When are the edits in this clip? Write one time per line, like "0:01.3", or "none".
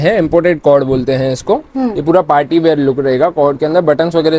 none